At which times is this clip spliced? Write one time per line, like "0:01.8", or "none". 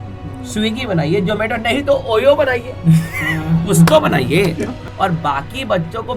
0:04.8